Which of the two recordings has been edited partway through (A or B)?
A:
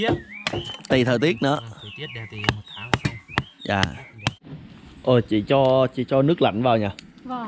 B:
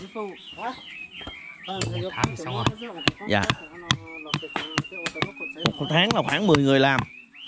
A